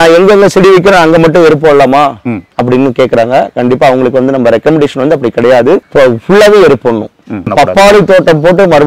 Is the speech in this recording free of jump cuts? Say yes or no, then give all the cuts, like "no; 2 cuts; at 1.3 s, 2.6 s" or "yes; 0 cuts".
no; 2 cuts; at 5.9 s, 7.5 s